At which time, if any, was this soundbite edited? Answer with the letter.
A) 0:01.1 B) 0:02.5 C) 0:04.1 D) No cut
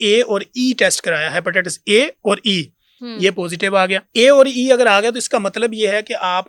C